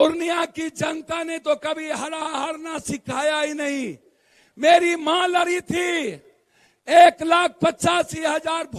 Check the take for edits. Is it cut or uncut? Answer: uncut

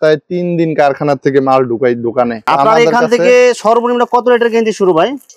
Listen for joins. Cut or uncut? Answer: uncut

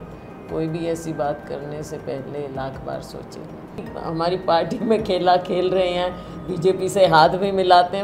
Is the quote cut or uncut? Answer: cut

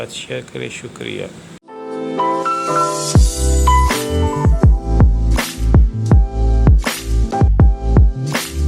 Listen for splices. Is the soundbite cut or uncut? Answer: cut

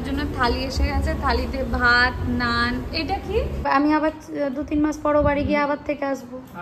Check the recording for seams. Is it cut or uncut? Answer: cut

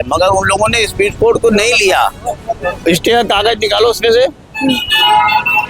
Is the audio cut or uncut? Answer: uncut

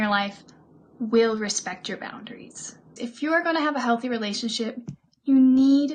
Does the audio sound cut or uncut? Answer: cut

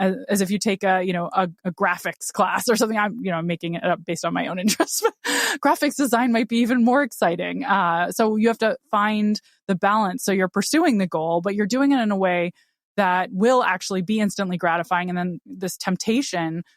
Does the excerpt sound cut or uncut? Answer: cut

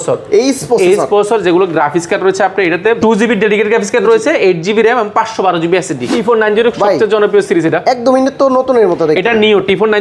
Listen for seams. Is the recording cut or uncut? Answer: cut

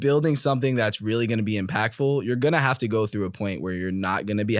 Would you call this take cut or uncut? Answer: uncut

